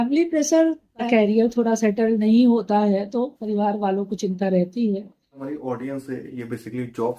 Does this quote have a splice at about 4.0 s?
no; 2 cuts; at 1.1 s, 5.4 s

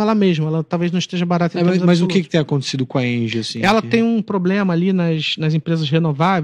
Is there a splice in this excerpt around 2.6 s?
no; 0 cuts

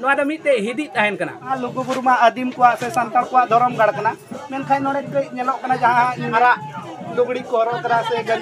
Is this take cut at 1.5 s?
yes; 2 cuts; at 1.5 s, 6.3 s

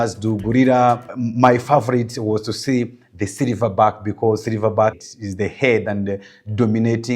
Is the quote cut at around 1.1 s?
yes; 1 cut; at 1.1 s

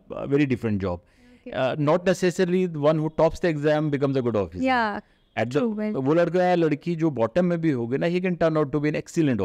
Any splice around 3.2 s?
no; 0 cuts

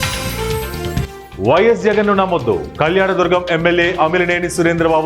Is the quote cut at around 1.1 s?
yes; 1 cut; at 1.1 s

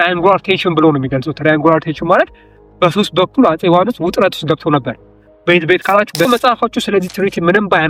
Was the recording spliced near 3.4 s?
no; 1 cut; at 6.3 s

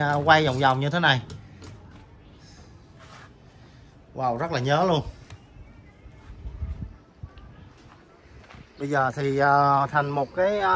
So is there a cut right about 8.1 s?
yes; 1 cut; at 8.1 s

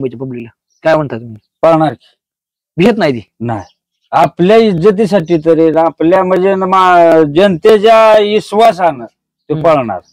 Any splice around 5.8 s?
no; 0 cuts

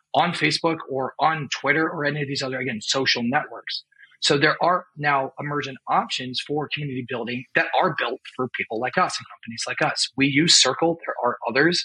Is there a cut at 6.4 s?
no; 0 cuts

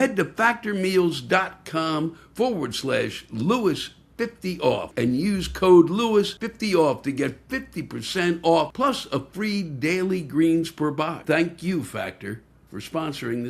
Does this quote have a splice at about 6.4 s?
yes; 4 cuts; at 4.9 s, 6.4 s, 8.7 s, 11.2 s

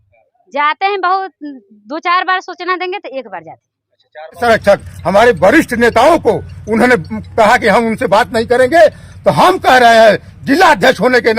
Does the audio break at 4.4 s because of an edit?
yes; 1 cut; at 4.4 s

